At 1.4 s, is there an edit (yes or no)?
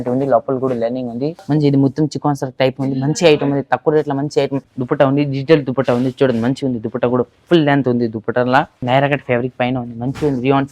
yes